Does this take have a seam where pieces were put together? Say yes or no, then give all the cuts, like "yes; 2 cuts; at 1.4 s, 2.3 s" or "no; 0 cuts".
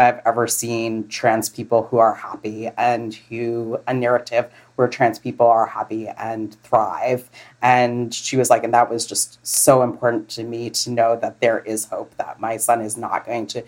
no; 0 cuts